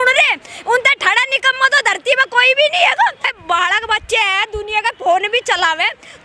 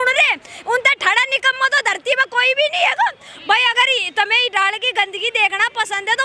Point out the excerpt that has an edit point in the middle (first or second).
first